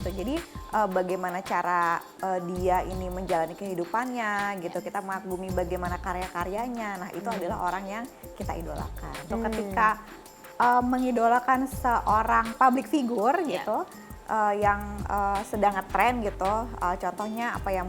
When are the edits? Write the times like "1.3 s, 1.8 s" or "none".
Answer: 9.3 s